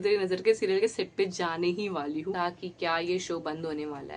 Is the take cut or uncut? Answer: cut